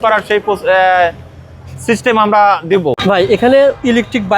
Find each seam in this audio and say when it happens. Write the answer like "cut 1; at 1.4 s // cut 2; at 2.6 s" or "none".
cut 1; at 3.0 s

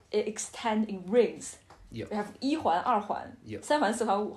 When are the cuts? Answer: none

